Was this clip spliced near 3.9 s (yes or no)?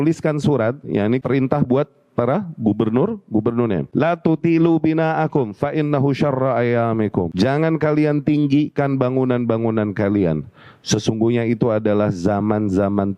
yes